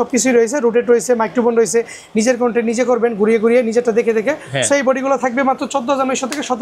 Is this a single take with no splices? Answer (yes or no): yes